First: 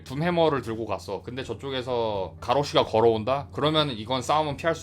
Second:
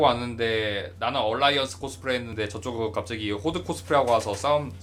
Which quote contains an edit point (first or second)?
first